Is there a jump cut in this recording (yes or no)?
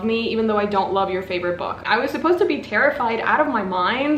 yes